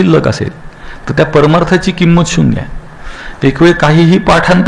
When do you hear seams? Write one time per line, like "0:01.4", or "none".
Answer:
none